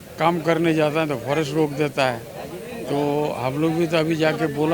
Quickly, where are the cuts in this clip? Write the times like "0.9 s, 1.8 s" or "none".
none